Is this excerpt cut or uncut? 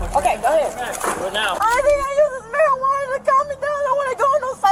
uncut